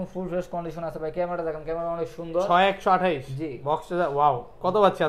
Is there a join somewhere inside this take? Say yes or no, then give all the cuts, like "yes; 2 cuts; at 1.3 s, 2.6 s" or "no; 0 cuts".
no; 0 cuts